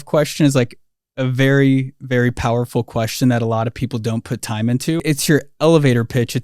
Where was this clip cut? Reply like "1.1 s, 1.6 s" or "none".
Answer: 5.0 s